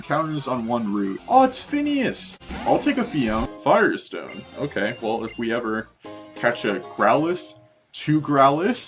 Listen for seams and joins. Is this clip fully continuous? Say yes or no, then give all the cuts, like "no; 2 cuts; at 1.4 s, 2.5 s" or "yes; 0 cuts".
no; 3 cuts; at 1.2 s, 2.3 s, 3.5 s